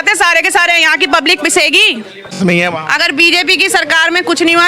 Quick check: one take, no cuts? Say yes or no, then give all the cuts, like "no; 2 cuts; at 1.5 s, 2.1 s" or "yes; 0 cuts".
no; 1 cut; at 2.4 s